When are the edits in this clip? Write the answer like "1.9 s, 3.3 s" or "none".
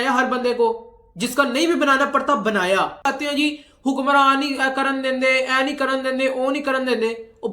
3.0 s